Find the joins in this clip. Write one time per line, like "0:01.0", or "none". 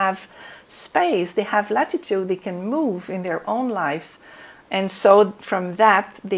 none

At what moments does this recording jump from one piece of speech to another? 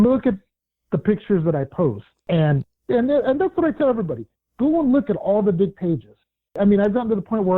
0:02.1
0:06.6

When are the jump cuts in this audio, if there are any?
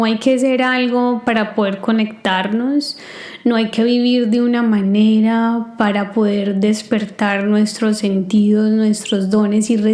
none

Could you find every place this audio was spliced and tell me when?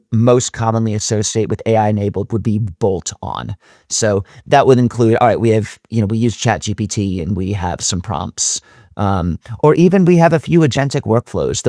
none

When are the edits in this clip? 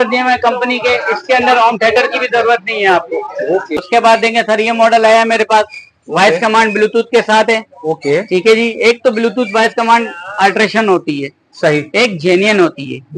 0:03.7

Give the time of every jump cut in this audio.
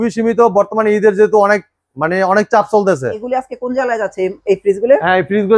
0:03.2

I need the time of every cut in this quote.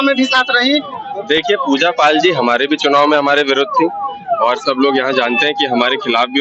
0:00.9

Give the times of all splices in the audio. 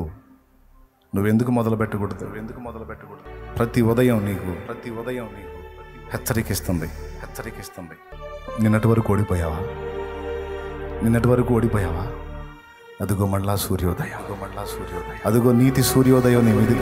0:03.2
0:08.1

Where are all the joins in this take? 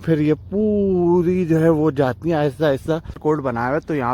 0:03.2

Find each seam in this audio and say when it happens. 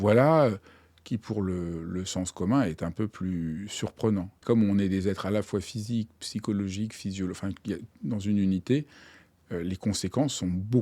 0:04.4

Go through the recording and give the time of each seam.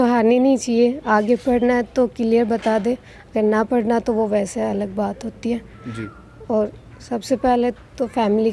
none

